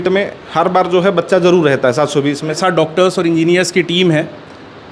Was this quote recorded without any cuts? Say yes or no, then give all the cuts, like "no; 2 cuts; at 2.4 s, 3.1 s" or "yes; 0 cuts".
no; 1 cut; at 2.6 s